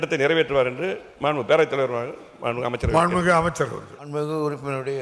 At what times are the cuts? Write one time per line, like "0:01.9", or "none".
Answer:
0:03.9